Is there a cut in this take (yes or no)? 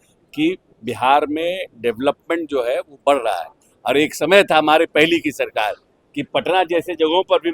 no